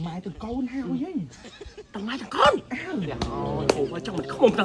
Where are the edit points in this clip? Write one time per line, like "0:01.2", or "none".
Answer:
none